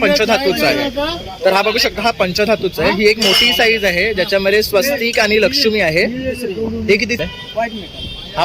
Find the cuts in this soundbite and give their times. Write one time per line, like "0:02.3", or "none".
0:07.2